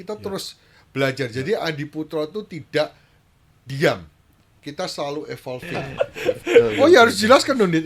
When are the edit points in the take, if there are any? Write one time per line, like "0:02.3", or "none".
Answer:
0:05.8